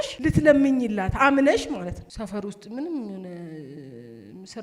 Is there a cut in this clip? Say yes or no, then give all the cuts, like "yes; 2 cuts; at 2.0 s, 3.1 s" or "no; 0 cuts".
yes; 1 cut; at 2.1 s